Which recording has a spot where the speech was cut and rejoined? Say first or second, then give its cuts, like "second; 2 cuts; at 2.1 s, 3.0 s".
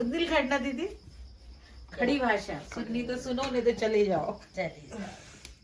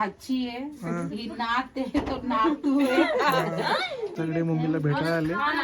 second; 1 cut; at 4.0 s